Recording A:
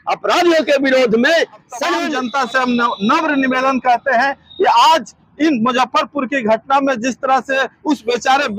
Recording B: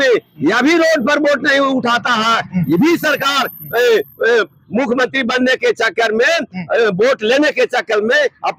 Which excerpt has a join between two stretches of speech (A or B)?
A